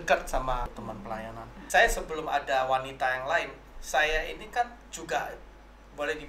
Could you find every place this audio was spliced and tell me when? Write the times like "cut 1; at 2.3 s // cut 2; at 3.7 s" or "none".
cut 1; at 1.0 s